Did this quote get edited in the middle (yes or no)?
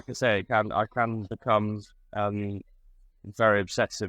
no